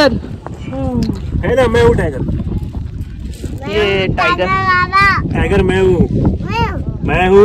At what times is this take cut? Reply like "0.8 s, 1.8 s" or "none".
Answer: none

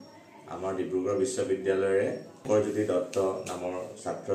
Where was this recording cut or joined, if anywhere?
2.3 s

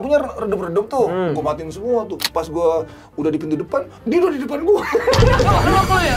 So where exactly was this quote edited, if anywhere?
none

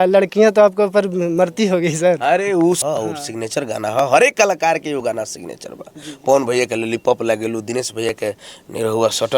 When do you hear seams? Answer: 2.8 s

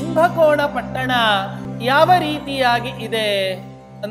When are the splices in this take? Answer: 1.6 s

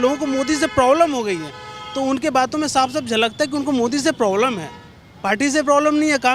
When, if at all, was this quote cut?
none

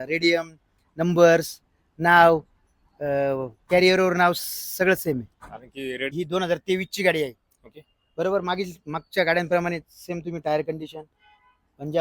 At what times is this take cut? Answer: 6.1 s

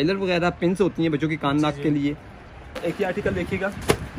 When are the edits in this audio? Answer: 2.7 s

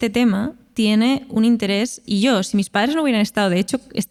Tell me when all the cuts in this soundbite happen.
none

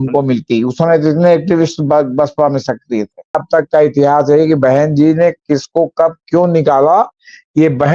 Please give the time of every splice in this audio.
3.3 s

